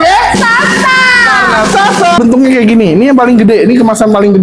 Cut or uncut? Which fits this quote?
cut